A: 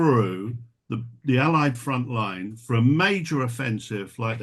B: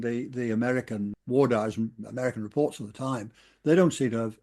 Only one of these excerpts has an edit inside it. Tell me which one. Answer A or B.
B